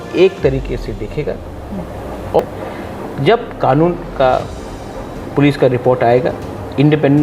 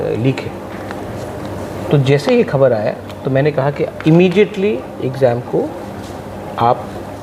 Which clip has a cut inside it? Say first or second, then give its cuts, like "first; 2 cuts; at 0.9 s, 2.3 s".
first; 1 cut; at 2.4 s